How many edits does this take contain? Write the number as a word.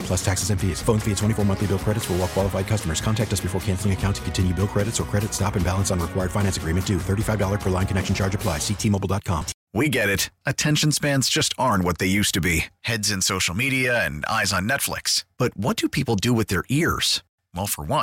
one